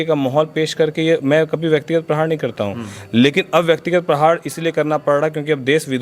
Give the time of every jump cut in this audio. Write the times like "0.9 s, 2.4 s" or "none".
none